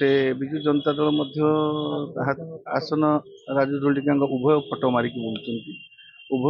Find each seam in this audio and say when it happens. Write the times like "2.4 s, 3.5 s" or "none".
none